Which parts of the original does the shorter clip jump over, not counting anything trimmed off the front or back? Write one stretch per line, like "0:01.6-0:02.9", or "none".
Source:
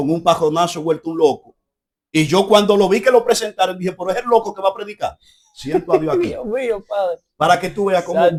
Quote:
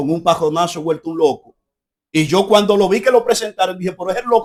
none